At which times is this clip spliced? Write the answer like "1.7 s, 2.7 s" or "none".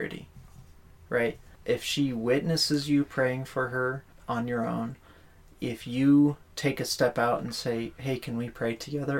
1.5 s, 4.1 s